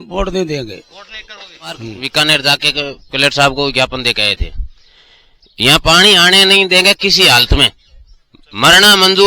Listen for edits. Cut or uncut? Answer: cut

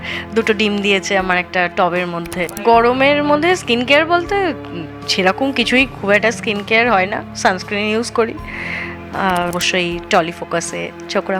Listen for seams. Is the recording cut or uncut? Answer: cut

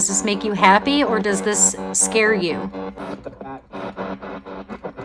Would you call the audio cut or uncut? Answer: cut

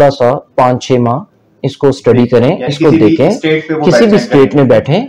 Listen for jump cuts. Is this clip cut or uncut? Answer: uncut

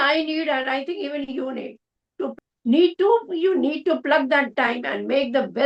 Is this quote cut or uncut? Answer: cut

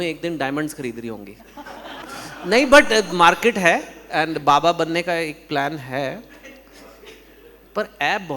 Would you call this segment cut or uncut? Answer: cut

